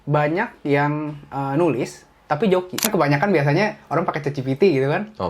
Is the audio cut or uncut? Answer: cut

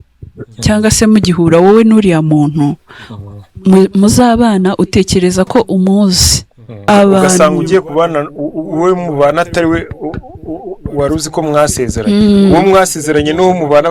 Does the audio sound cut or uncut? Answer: cut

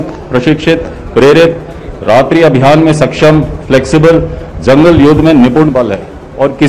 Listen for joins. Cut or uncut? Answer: uncut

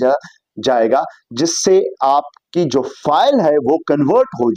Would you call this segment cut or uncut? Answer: uncut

